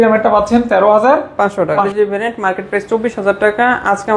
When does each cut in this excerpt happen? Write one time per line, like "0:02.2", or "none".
0:01.8